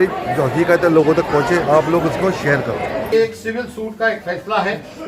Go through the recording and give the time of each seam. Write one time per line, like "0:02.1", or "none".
0:03.1